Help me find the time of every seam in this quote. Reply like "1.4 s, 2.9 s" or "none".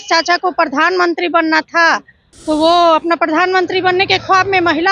none